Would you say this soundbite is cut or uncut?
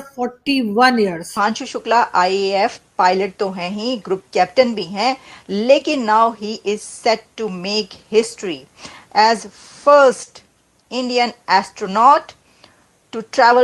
cut